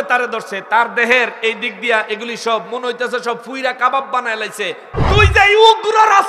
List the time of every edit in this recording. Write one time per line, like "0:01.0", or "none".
0:04.8